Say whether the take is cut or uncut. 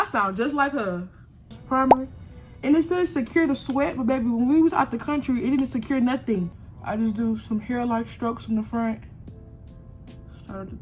cut